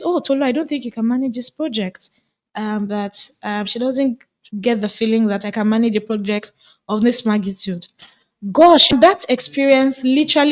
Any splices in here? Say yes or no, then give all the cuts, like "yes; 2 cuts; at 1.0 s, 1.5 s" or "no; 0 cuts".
yes; 1 cut; at 9.1 s